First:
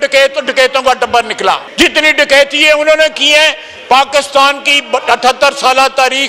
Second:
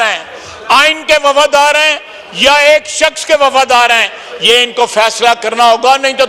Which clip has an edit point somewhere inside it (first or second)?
first